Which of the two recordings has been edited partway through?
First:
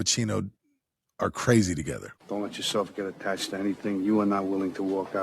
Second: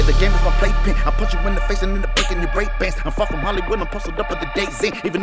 first; 1 cut; at 2.1 s

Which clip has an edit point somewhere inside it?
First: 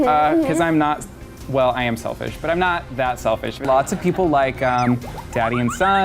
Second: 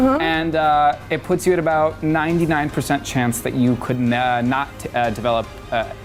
first; 1 cut; at 3.6 s

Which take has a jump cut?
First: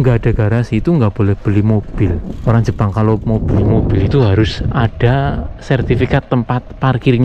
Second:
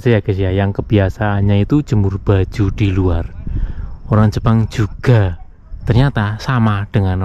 first; 1 cut; at 2.3 s

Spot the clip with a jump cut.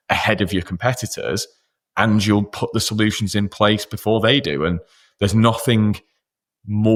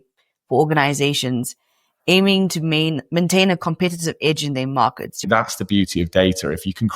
second; 1 cut; at 5.2 s

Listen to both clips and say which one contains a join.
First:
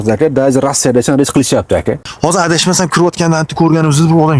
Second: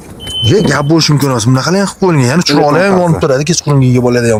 first; 1 cut; at 2.1 s

